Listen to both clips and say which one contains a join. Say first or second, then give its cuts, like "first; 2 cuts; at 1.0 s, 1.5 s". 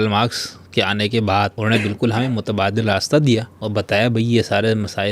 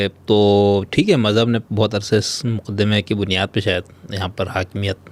first; 2 cuts; at 1.6 s, 3.6 s